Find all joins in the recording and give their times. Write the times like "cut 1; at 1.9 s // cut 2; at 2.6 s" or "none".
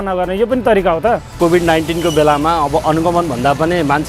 cut 1; at 1.4 s